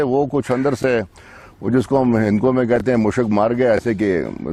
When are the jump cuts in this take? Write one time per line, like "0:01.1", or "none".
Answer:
none